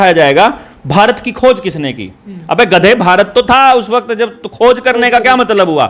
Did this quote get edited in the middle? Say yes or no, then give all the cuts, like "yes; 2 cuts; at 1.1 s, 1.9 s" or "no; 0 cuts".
no; 0 cuts